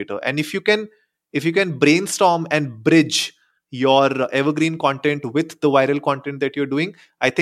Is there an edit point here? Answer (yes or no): no